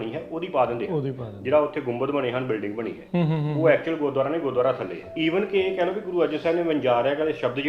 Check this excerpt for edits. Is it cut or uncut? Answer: cut